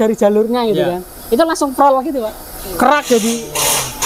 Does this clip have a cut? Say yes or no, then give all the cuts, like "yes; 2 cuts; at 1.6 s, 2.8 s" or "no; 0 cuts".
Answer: no; 0 cuts